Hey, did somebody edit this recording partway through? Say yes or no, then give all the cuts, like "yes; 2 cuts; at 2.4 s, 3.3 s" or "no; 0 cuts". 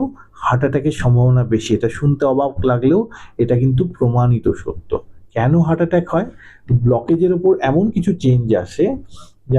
no; 0 cuts